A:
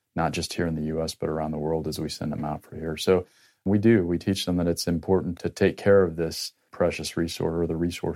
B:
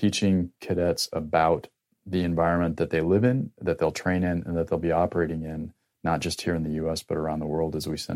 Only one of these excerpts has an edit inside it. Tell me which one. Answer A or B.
A